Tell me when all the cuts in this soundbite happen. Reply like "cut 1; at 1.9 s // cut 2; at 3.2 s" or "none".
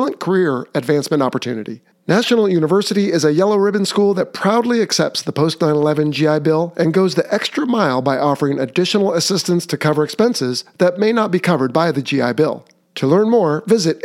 none